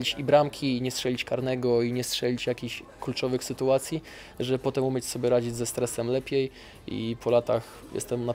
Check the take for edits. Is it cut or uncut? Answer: uncut